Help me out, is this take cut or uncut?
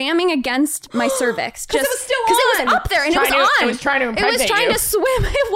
uncut